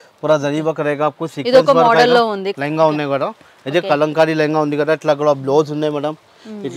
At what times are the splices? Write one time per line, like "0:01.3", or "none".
0:02.5